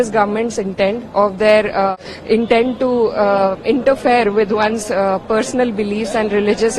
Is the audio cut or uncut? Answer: cut